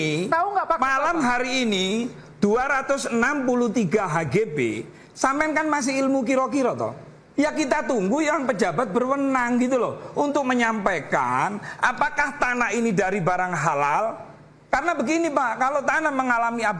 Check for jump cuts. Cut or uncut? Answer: uncut